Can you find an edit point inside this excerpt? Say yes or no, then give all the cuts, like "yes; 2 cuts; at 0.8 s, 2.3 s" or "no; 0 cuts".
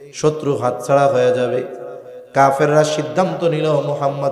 no; 0 cuts